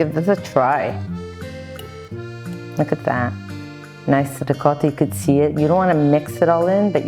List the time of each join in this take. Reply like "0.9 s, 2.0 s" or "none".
0.9 s, 2.8 s